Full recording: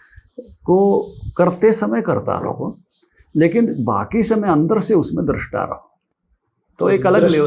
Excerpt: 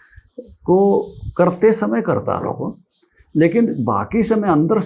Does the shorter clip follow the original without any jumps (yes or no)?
yes